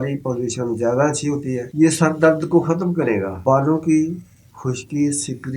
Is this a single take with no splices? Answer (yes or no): no